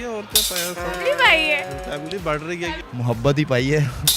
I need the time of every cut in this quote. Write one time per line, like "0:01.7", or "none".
0:02.8